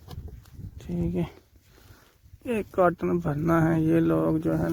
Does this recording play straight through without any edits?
yes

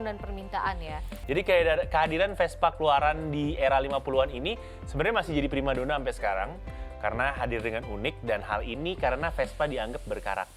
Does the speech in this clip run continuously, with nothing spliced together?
no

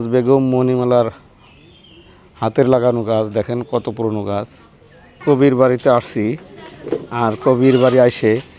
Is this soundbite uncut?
no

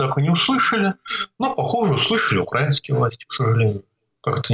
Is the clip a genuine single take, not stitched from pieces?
yes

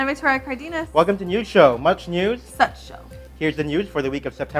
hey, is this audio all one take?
yes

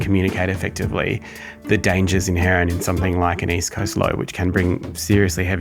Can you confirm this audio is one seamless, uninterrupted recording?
yes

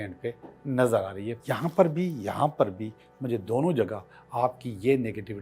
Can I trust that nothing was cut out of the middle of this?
no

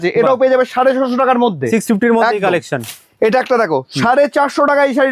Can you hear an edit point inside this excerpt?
no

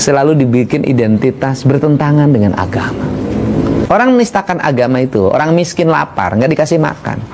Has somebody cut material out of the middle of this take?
yes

